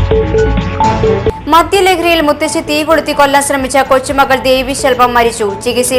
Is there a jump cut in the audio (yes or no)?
yes